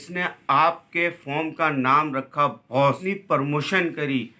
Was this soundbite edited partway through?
yes; 1 cut; at 3.0 s

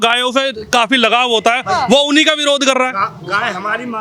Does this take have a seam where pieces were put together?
no; 0 cuts

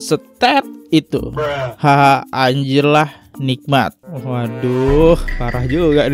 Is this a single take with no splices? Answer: yes; 0 cuts

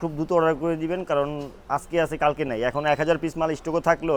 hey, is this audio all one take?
yes; 0 cuts

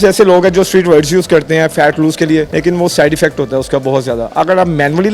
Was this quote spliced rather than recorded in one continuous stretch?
yes; 1 cut; at 2.5 s

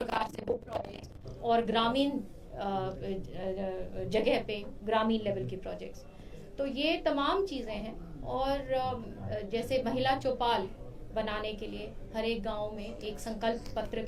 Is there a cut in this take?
no; 0 cuts

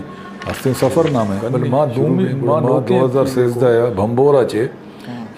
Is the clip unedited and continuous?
no; 1 cut; at 2.6 s

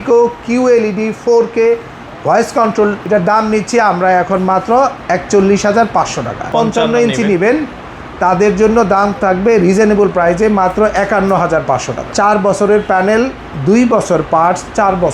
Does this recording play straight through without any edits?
no; 3 cuts; at 3.0 s, 6.5 s, 12.0 s

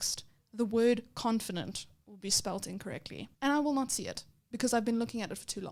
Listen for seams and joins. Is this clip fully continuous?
yes; 0 cuts

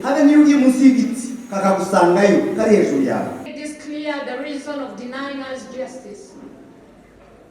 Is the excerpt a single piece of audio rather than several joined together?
no; 1 cut; at 3.5 s

